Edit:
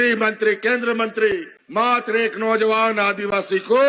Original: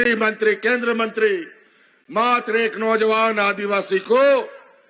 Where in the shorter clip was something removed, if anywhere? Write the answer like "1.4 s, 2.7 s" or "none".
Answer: 1.5 s